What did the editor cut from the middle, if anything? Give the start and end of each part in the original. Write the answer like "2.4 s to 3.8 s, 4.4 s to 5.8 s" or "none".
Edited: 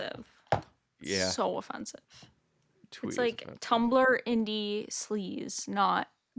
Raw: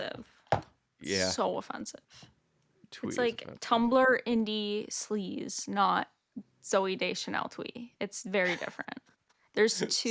none